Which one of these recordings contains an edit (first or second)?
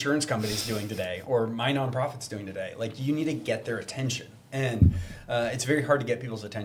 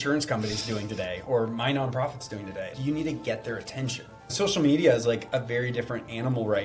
second